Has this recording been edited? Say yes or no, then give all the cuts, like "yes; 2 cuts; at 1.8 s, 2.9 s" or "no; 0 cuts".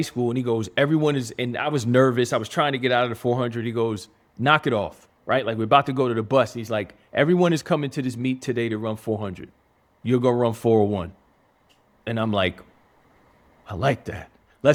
no; 0 cuts